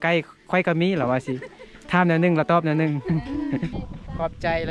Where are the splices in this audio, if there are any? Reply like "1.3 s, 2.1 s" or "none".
3.8 s